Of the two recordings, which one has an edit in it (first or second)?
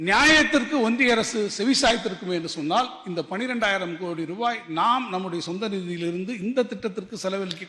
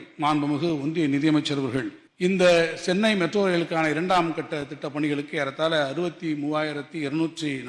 second